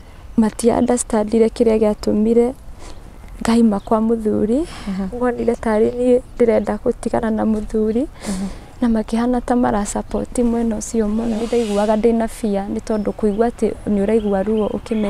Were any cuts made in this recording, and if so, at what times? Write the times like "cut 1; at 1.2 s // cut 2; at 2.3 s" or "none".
cut 1; at 11.5 s